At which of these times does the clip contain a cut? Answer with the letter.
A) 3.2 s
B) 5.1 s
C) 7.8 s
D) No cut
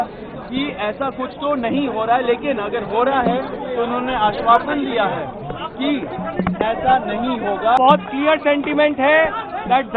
C